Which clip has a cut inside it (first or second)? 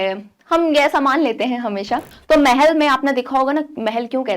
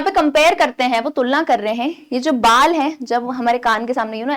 first